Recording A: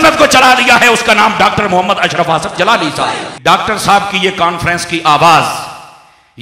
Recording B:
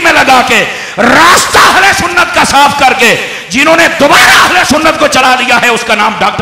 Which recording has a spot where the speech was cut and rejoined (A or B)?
A